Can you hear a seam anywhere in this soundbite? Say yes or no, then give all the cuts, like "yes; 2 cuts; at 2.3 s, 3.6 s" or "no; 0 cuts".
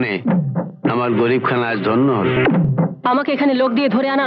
no; 0 cuts